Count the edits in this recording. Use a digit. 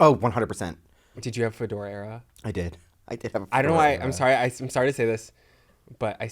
1